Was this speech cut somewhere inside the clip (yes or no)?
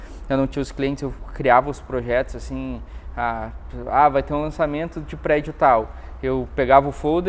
no